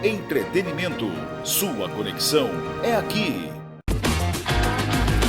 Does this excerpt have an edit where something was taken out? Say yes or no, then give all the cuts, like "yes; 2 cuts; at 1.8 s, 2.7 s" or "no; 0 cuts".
no; 0 cuts